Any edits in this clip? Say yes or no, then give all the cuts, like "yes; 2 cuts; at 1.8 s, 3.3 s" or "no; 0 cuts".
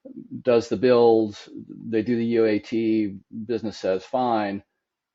no; 0 cuts